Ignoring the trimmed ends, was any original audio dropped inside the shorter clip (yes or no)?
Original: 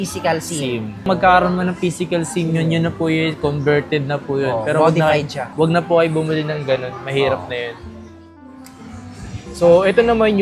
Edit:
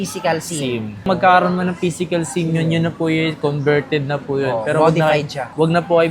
no